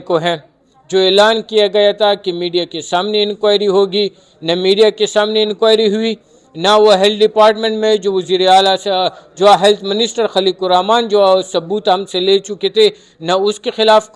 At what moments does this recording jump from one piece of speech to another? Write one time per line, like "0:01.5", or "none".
none